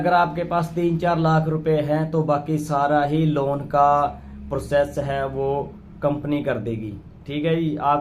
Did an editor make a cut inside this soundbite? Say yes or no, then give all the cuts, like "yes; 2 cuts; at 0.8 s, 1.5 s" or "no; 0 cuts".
no; 0 cuts